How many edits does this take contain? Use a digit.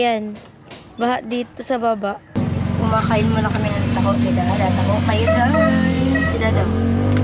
1